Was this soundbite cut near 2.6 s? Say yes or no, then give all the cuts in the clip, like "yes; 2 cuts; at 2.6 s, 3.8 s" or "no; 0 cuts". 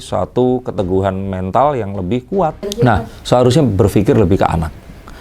yes; 1 cut; at 2.6 s